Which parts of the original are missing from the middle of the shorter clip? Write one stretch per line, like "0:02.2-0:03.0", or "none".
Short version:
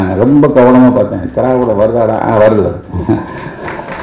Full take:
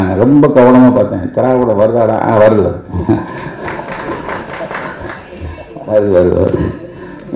none